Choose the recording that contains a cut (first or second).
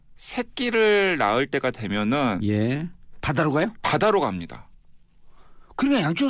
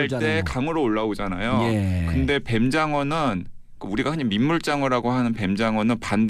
first